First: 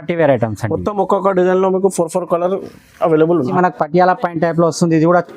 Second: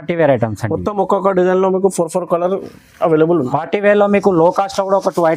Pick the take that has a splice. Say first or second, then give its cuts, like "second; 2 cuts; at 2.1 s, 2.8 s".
first; 1 cut; at 3.5 s